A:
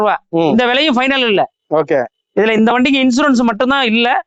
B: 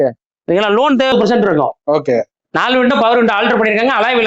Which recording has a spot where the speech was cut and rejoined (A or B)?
B